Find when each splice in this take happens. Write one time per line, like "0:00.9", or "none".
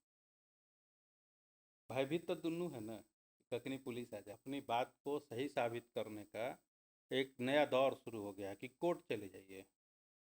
0:04.3